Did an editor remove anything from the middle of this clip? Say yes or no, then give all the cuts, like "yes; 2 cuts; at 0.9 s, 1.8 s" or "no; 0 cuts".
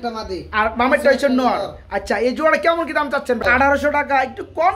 yes; 1 cut; at 3.4 s